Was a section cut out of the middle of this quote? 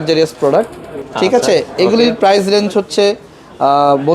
no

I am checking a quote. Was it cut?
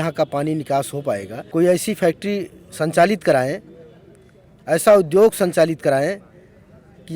yes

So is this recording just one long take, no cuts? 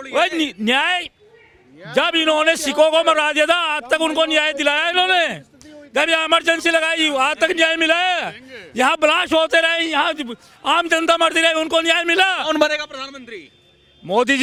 yes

